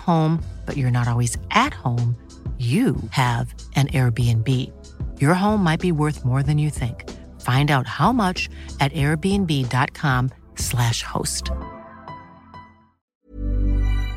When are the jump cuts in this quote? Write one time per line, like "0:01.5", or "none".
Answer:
0:13.0